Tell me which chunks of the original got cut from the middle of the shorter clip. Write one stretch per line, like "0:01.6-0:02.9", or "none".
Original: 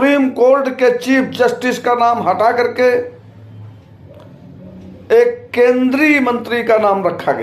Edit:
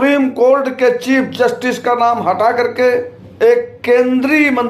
0:03.2-0:04.9